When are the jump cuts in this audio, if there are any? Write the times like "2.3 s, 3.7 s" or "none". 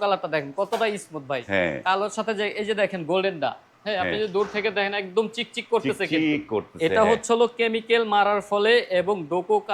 none